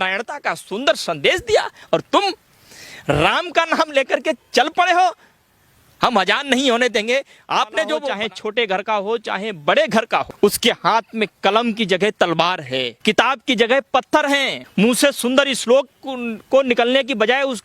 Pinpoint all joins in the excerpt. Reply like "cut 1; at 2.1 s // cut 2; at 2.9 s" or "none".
cut 1; at 8.1 s // cut 2; at 10.3 s // cut 3; at 12.9 s // cut 4; at 14.6 s